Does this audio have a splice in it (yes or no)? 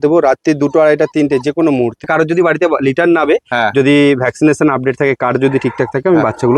yes